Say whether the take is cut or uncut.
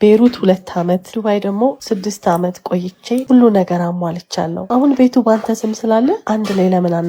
cut